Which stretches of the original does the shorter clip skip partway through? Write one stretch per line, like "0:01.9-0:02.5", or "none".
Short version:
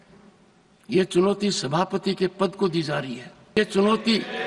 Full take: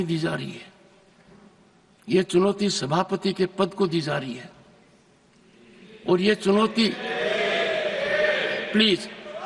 0:04.7-0:06.3